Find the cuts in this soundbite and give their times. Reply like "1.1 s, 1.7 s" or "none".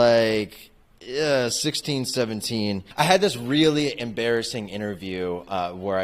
2.8 s